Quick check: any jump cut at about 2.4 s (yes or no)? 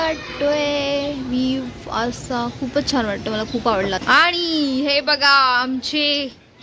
no